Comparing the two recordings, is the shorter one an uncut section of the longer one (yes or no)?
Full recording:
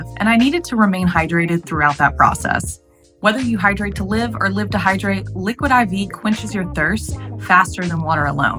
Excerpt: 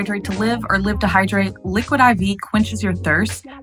yes